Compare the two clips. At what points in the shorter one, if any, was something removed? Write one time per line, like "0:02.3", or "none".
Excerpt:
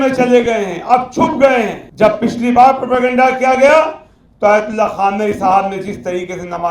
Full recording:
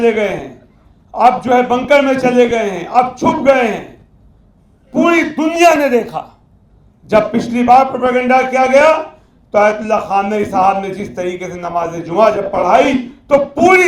0:01.8